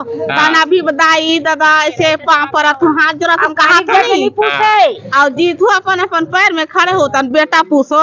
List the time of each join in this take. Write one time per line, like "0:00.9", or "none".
none